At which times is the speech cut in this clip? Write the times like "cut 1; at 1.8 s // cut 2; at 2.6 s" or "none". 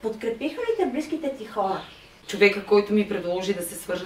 cut 1; at 2.2 s